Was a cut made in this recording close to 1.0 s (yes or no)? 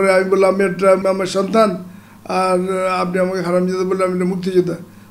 yes